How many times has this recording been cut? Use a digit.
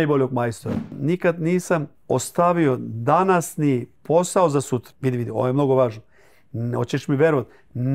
4